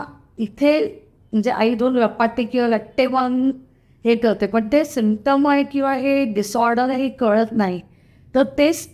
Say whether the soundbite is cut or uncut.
uncut